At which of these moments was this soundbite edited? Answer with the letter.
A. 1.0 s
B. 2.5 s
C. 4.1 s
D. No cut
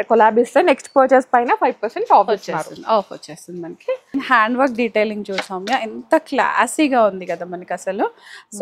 C